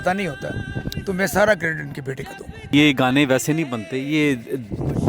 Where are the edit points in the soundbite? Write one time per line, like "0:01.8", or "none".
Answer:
0:02.7